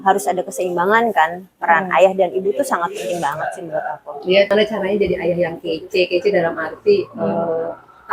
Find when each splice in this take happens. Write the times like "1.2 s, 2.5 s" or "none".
4.5 s